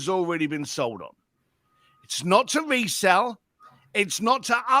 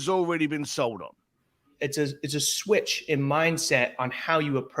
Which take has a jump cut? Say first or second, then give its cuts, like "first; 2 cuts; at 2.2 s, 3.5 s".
second; 1 cut; at 1.7 s